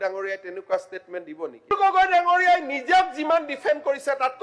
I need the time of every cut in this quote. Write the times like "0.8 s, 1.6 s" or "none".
1.7 s